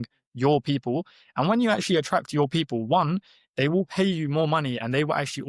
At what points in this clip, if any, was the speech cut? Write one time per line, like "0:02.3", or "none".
none